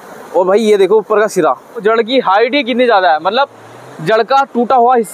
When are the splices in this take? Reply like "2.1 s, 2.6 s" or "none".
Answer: 1.7 s